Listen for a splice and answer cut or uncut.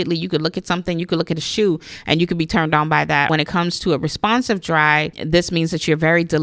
cut